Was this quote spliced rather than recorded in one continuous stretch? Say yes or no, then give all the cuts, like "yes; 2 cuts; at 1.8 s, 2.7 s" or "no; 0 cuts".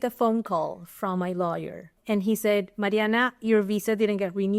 yes; 1 cut; at 1.9 s